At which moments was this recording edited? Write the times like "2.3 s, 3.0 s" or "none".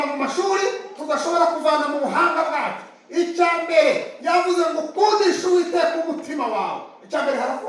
none

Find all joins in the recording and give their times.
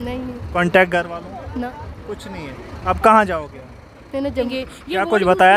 4.5 s

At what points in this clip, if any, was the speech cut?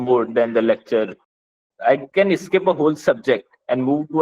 1.4 s

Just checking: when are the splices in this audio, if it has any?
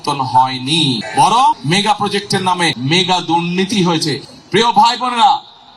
1.0 s, 1.6 s, 2.8 s, 4.2 s

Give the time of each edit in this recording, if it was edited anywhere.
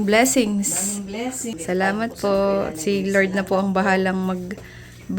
0.9 s

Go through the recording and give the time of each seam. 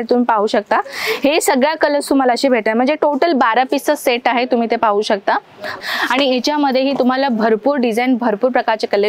5.8 s

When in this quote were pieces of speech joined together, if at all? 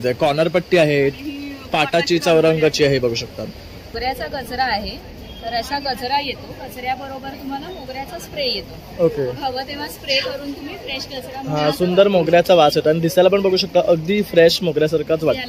3.9 s

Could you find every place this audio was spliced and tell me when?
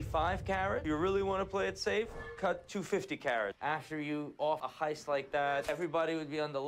3.5 s, 4.7 s, 5.7 s

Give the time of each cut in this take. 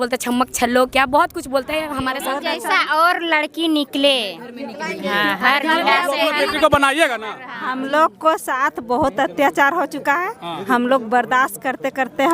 2.2 s

